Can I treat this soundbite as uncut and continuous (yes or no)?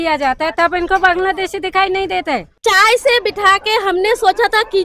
no